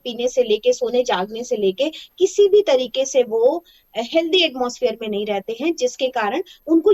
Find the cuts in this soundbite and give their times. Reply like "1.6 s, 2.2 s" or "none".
none